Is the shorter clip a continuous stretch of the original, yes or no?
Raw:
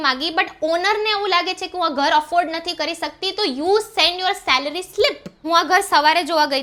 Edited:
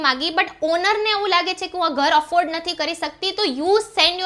yes